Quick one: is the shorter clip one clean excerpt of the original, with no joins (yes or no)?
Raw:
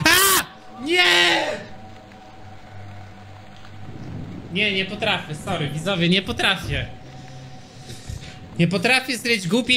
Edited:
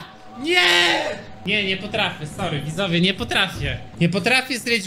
no